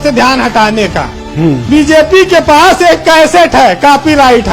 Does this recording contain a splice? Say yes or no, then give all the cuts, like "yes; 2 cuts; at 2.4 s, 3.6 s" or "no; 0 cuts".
yes; 1 cut; at 1.6 s